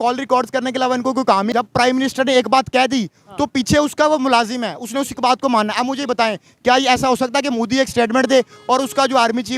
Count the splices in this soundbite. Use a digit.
1